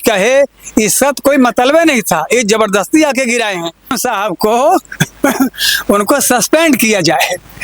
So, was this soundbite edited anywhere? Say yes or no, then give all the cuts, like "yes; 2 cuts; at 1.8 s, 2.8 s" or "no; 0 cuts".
yes; 1 cut; at 4.0 s